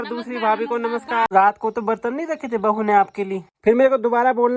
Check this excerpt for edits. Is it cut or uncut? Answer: cut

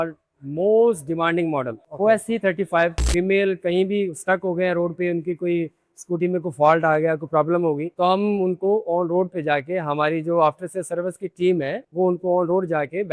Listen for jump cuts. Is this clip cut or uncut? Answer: cut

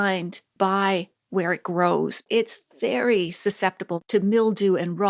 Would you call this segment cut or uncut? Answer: cut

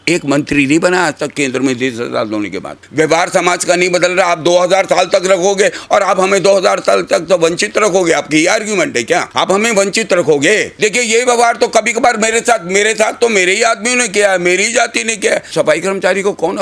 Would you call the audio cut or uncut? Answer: cut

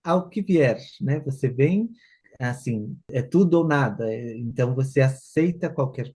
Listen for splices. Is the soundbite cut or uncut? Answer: uncut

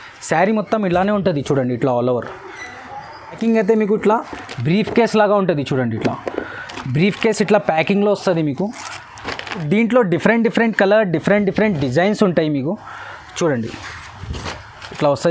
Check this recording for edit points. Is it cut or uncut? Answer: cut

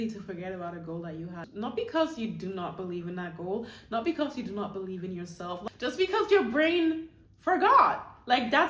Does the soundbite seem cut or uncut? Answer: cut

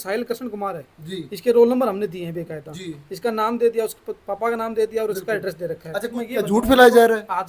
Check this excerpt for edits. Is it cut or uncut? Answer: cut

